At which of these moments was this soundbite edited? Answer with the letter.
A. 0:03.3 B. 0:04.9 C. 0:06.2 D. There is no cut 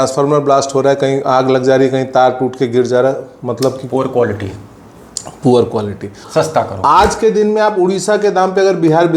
C